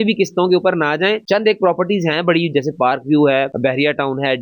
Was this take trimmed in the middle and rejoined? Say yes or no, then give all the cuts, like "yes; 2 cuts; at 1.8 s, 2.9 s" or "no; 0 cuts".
no; 0 cuts